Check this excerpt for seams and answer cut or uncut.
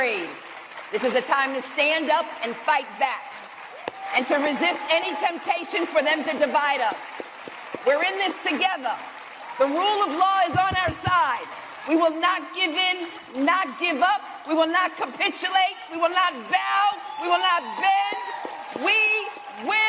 uncut